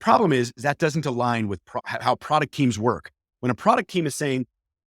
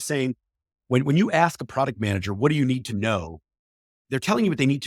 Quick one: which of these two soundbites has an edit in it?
first; 1 cut; at 1.8 s

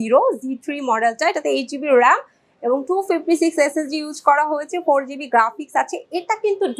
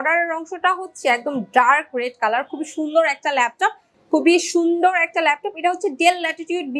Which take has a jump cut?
second; 1 cut; at 3.9 s

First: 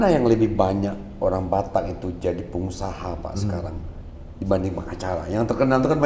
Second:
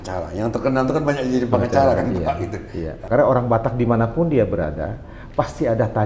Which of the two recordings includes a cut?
second; 1 cut; at 3.0 s

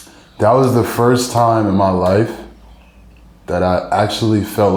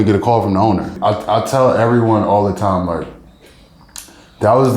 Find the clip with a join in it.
second; 1 cut; at 1.0 s

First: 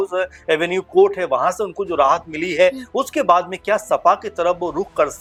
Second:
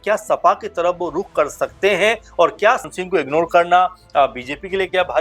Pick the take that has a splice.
second; 1 cut; at 2.9 s

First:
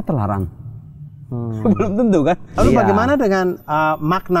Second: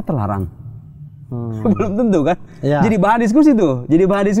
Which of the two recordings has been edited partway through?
first; 1 cut; at 2.6 s

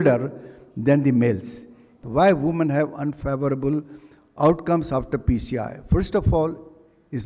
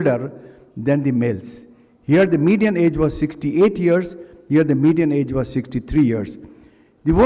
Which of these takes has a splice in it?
first; 1 cut; at 1.9 s

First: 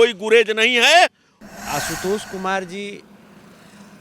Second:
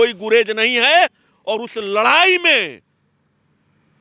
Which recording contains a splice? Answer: first; 1 cut; at 1.3 s

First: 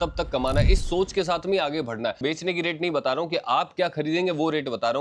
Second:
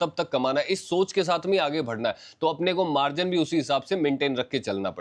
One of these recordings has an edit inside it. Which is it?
first; 1 cut; at 2.2 s

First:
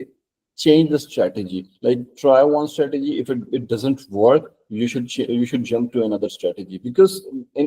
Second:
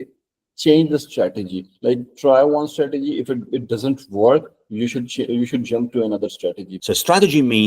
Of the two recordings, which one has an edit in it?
second; 1 cut; at 6.7 s

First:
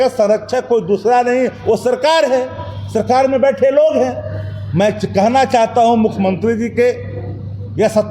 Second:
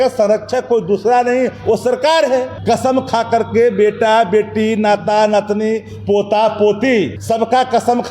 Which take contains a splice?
second; 2 cuts; at 2.5 s, 7.2 s

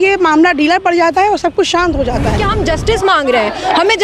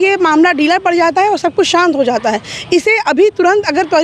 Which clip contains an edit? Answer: first; 1 cut; at 2.5 s

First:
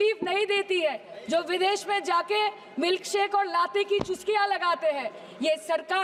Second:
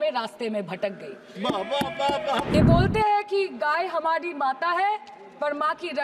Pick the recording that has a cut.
second; 1 cut; at 2.5 s

